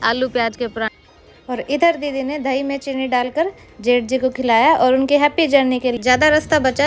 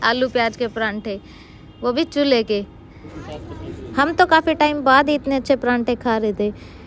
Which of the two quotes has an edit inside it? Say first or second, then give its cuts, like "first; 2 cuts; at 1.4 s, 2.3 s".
first; 2 cuts; at 1.0 s, 5.9 s